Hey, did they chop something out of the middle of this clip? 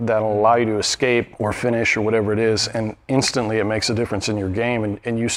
yes; 1 cut; at 1.3 s

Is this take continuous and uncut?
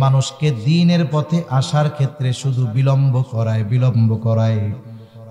yes; 0 cuts

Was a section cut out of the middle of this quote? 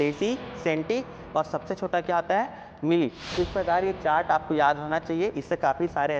yes; 1 cut; at 3.2 s

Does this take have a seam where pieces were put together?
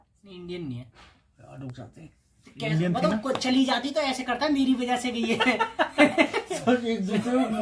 no; 0 cuts

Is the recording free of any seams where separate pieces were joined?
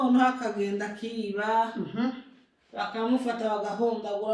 yes; 0 cuts

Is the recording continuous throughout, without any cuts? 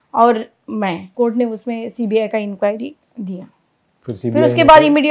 no; 2 cuts; at 1.0 s, 3.0 s

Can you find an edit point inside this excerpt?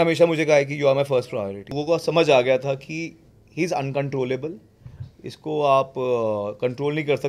yes; 1 cut; at 1.8 s

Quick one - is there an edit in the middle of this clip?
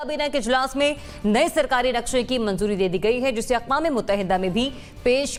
no; 0 cuts

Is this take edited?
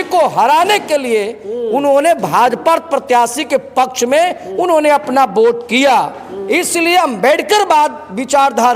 yes; 1 cut; at 6.3 s

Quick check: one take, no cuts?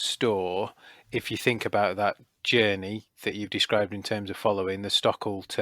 yes; 0 cuts

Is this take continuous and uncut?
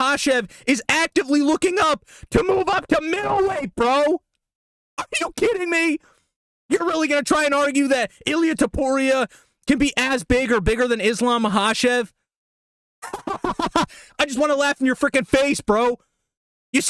yes; 0 cuts

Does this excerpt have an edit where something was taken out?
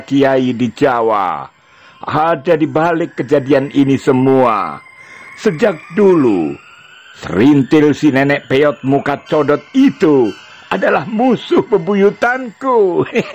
no; 0 cuts

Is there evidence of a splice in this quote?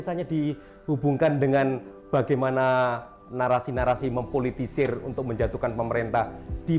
no; 0 cuts

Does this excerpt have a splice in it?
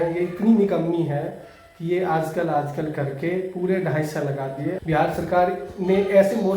yes; 1 cut; at 4.8 s

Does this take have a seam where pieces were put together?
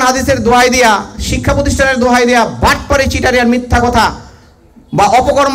no; 0 cuts

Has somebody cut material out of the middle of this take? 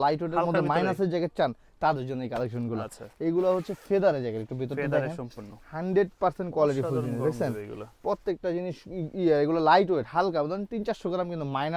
no; 0 cuts

